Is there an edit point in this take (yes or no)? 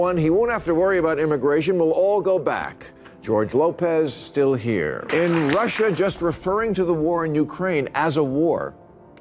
yes